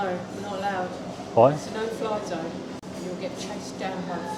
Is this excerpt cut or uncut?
cut